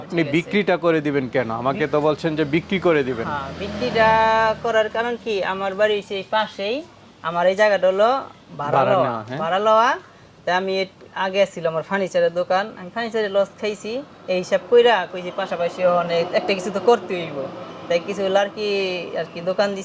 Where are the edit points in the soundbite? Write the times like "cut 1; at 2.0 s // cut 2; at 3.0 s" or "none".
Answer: none